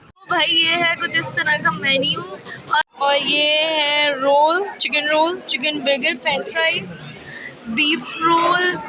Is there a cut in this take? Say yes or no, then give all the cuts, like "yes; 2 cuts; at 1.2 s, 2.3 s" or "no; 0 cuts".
yes; 1 cut; at 2.8 s